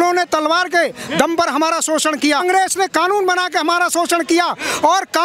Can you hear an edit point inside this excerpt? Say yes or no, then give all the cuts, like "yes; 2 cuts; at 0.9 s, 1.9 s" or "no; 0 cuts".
yes; 1 cut; at 2.4 s